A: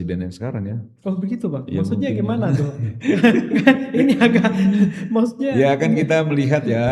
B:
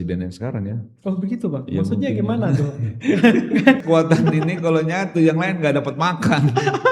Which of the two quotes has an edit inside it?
B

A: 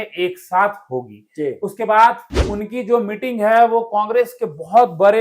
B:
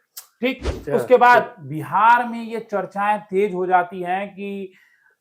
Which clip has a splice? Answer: A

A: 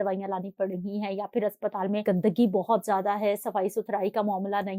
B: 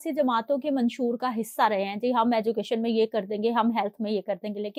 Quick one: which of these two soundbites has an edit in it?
A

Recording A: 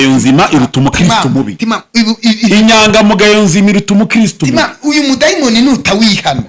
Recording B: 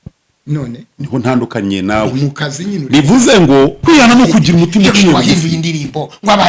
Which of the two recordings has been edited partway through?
B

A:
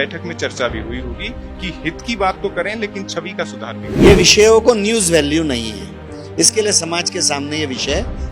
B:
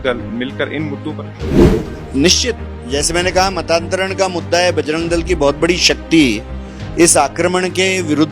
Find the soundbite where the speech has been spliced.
A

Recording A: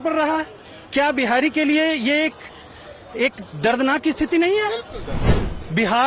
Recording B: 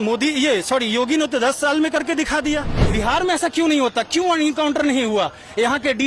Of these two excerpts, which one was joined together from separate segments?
B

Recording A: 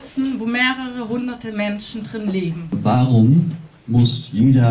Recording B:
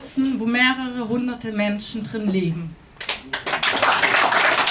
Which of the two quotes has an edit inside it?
A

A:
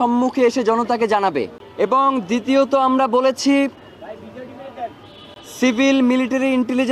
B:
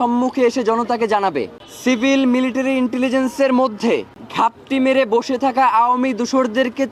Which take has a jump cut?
B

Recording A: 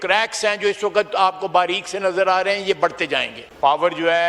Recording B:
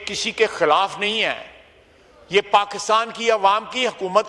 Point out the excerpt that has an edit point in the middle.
A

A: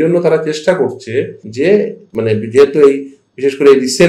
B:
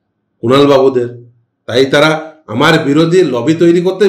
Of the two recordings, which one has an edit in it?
A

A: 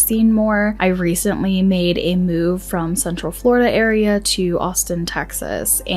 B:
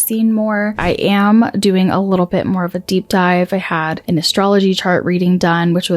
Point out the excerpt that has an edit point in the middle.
B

